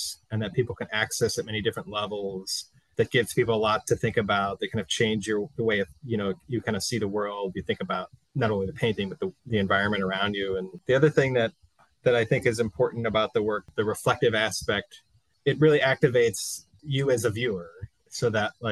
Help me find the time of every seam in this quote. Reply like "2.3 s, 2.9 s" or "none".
8.2 s, 9.4 s, 10.8 s, 13.7 s